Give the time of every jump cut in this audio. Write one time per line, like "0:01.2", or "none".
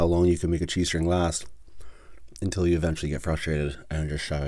none